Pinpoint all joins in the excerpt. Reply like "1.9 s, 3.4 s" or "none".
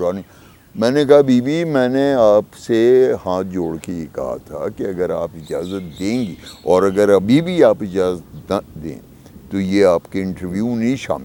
none